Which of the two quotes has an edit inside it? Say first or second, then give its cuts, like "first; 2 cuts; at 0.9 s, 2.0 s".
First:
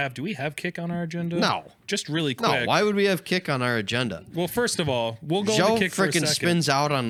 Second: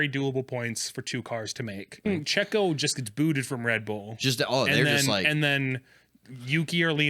second; 1 cut; at 2.1 s